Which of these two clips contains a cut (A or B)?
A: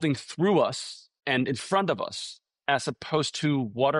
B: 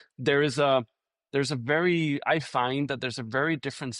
A